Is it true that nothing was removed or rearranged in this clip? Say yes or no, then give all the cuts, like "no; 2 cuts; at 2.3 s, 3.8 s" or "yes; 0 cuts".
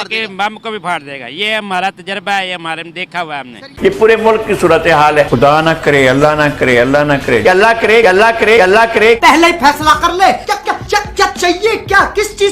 no; 1 cut; at 3.6 s